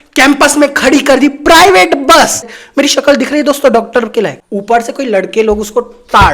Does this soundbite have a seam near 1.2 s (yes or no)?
no